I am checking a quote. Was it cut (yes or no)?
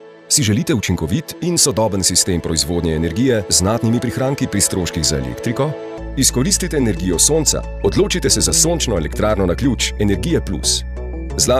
no